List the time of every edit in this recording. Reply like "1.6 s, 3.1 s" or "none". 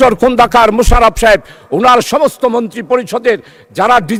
none